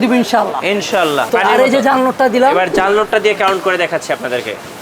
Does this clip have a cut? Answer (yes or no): yes